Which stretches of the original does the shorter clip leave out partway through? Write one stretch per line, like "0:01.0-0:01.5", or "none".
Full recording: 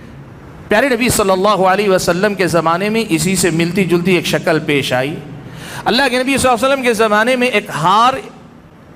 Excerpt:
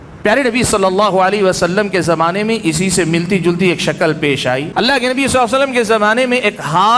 0:05.1-0:05.8